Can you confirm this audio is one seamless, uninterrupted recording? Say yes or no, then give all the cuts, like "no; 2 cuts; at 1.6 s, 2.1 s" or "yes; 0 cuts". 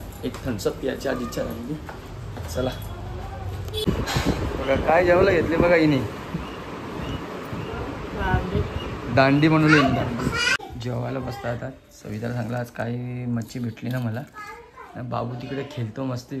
yes; 0 cuts